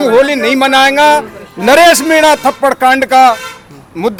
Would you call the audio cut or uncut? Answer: uncut